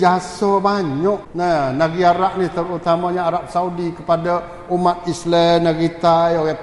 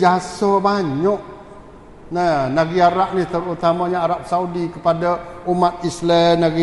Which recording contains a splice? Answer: first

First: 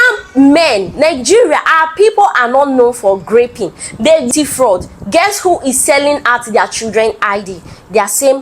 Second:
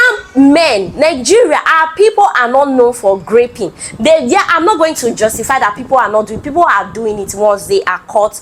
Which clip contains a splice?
first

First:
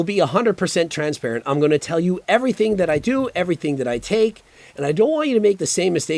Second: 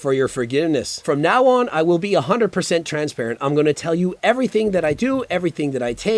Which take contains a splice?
second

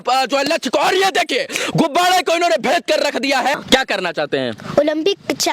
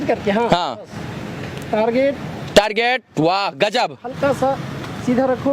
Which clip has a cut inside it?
first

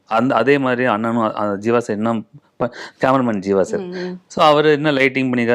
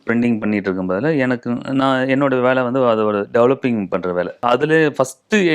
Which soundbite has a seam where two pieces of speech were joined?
second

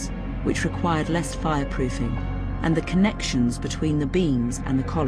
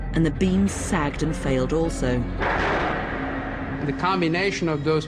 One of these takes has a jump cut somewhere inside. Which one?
second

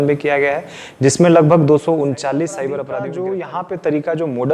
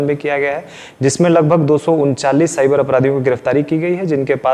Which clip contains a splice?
first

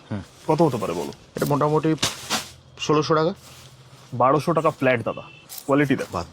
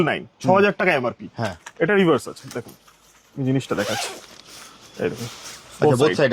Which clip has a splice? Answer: first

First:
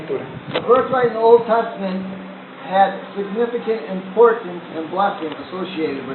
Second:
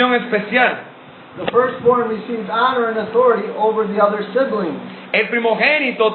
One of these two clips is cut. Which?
second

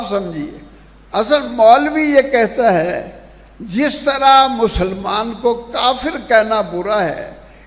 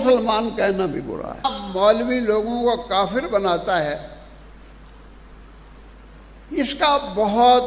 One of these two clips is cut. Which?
second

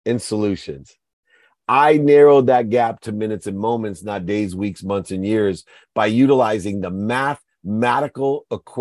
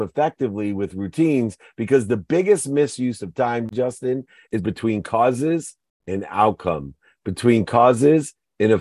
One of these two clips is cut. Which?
second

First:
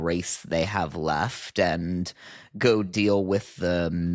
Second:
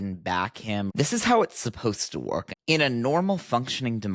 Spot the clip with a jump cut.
second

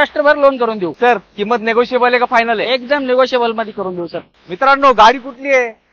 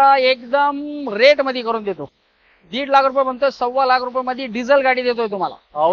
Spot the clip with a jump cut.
first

